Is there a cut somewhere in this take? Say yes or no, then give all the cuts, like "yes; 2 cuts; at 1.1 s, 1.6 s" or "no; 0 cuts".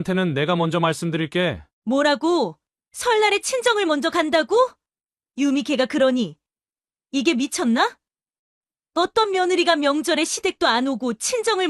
yes; 1 cut; at 1.7 s